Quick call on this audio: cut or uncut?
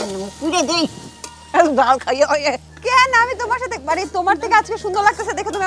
uncut